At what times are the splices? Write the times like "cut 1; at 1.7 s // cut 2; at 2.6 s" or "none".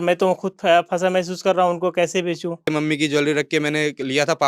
cut 1; at 2.7 s